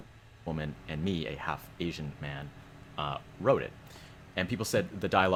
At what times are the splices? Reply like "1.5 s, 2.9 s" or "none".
none